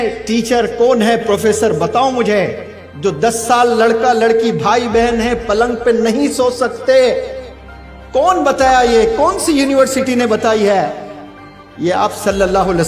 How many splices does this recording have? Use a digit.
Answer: 0